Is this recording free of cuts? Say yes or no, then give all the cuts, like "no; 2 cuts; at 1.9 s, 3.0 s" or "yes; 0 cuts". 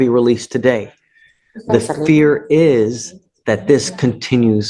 yes; 0 cuts